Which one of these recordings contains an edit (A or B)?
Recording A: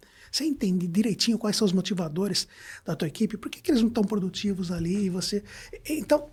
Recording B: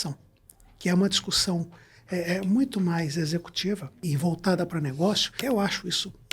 B